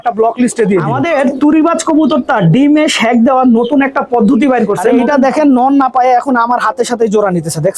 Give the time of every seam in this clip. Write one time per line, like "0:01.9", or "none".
0:00.9
0:05.0